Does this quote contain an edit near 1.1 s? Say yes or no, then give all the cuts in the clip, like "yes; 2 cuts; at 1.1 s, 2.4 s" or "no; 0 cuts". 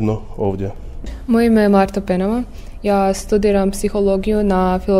yes; 1 cut; at 1.1 s